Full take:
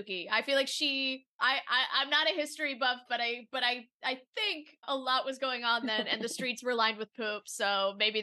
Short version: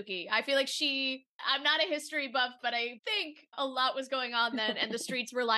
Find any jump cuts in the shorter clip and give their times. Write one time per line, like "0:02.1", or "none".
0:01.4
0:03.0